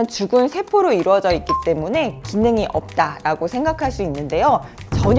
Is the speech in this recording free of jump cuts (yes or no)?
yes